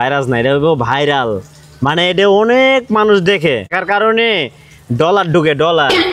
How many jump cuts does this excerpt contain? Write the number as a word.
one